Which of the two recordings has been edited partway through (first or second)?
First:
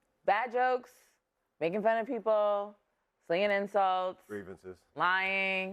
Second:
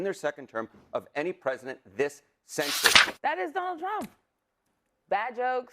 second